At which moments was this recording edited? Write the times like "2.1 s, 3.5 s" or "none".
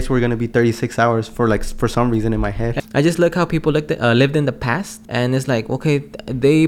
2.7 s, 5.0 s